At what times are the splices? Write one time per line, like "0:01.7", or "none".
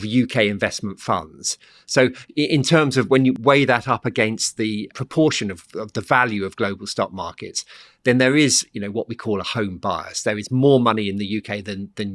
0:03.4
0:04.9